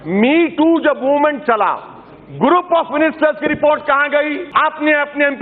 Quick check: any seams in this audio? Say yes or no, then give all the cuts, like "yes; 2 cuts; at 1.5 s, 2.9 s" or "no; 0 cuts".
yes; 1 cut; at 4.4 s